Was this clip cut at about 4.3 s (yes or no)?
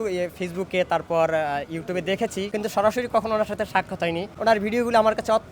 yes